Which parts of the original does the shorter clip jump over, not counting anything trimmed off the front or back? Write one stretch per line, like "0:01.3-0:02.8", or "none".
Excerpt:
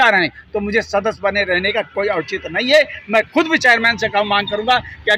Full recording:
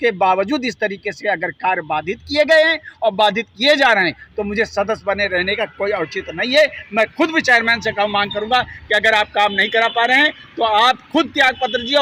none

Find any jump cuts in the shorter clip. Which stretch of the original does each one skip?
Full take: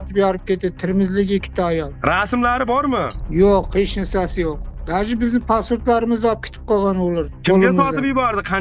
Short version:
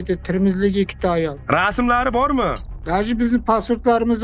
0:03.2-0:04.7

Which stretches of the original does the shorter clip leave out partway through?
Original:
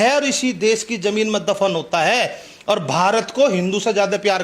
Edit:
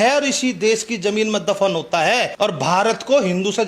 0:02.3-0:02.6

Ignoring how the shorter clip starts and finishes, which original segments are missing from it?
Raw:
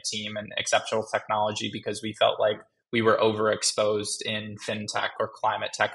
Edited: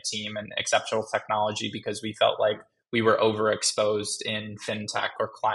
none

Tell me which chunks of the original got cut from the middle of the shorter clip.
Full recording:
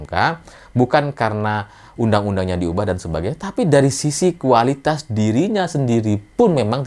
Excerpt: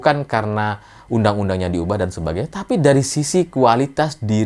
none

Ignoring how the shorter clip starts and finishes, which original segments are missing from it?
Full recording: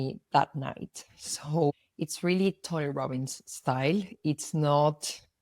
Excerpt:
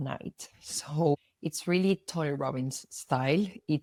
none

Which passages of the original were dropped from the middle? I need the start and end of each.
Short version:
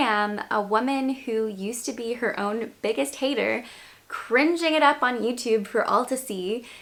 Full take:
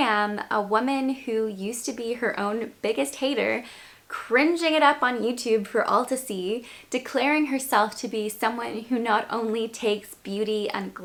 none

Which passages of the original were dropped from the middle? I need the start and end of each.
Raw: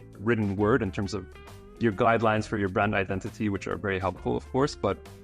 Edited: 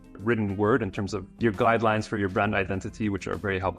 0:01.2-0:01.6

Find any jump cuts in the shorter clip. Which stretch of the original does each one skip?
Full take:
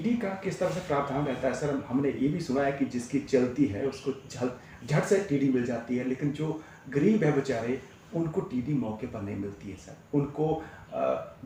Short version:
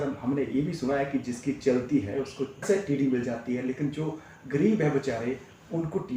0:04.3-0:05.1

